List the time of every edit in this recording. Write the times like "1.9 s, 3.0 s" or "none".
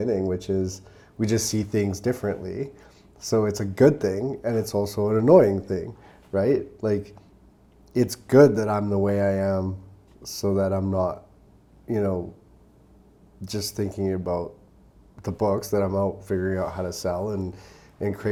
none